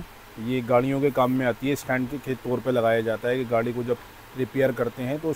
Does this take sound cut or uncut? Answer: uncut